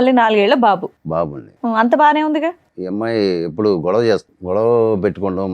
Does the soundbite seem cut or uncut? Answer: cut